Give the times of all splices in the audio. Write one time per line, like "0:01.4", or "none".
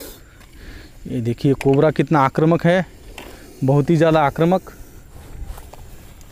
none